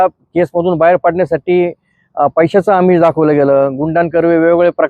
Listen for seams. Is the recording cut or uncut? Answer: uncut